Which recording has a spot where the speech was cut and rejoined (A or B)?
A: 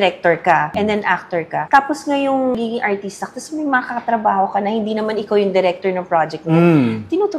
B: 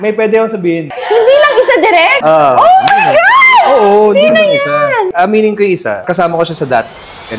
B